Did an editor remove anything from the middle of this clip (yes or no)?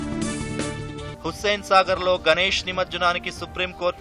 yes